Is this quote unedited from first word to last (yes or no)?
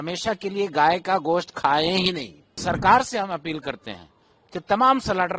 no